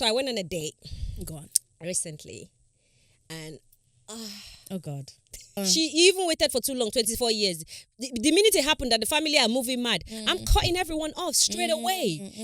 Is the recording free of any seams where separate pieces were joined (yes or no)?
no